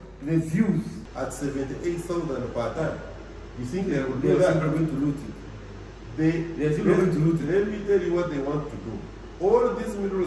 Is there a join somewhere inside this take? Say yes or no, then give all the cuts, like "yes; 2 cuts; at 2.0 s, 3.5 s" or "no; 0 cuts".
yes; 1 cut; at 1.0 s